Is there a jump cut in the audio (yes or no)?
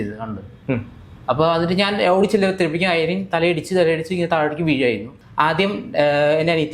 yes